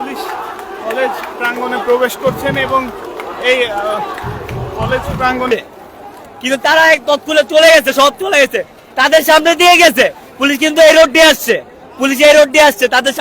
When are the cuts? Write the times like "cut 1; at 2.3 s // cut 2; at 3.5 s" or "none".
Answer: cut 1; at 5.5 s